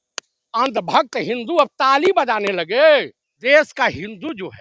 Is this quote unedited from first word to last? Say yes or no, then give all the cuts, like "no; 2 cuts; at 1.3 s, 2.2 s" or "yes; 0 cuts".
no; 1 cut; at 3.4 s